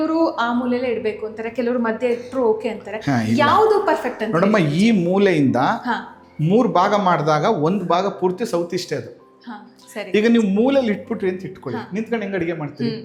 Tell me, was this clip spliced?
no; 0 cuts

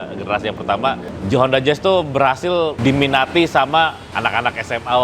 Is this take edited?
yes; 3 cuts; at 1.1 s, 2.8 s, 4.1 s

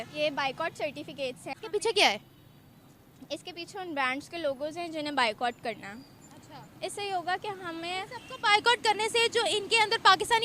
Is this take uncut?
no; 1 cut; at 1.6 s

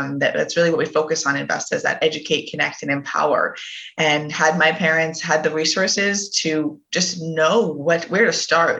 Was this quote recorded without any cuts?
yes; 0 cuts

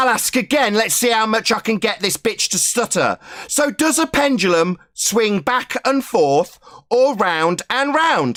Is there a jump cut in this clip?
no; 0 cuts

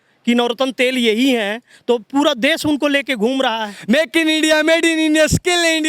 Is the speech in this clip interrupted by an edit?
yes; 1 cut; at 3.7 s

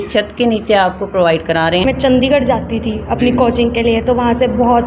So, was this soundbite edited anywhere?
yes; 1 cut; at 1.8 s

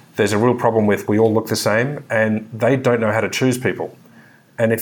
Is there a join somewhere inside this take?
no; 0 cuts

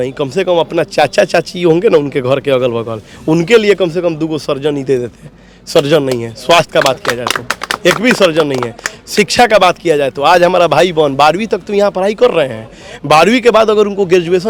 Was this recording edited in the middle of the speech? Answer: no; 0 cuts

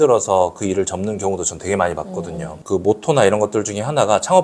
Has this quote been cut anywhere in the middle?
yes; 1 cut; at 2.6 s

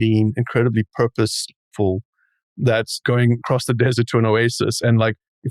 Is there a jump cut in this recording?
yes; 1 cut; at 3.0 s

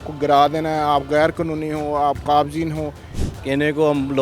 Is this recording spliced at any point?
yes; 1 cut; at 3.1 s

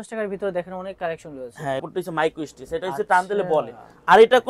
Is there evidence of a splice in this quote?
yes; 1 cut; at 1.8 s

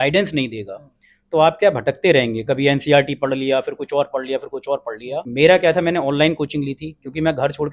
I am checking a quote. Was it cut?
yes; 1 cut; at 5.3 s

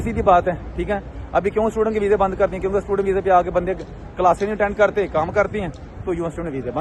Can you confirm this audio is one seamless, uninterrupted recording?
yes; 0 cuts

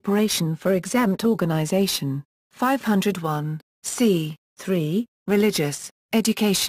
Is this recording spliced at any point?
yes; 1 cut; at 5.1 s

